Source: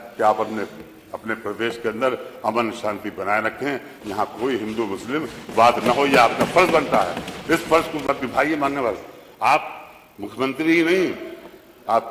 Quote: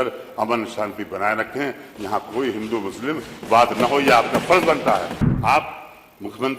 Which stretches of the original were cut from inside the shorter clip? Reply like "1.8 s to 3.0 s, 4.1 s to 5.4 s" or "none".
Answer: 7.3 s to 9.2 s